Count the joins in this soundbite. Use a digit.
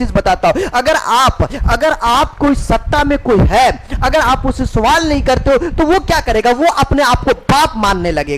0